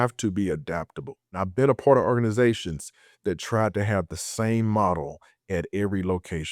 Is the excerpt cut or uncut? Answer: cut